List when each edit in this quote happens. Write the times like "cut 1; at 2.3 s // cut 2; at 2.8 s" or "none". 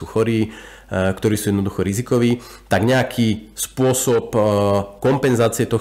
none